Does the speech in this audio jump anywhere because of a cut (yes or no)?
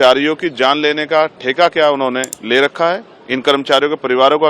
yes